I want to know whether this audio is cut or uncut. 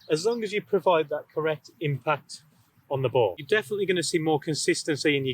cut